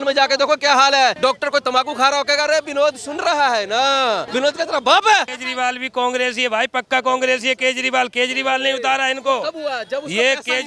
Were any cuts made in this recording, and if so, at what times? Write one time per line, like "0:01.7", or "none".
0:01.2
0:04.3
0:05.4